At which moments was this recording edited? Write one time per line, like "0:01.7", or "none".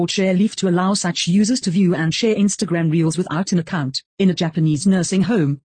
0:04.2